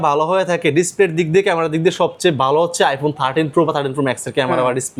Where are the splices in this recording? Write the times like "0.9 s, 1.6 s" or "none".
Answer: none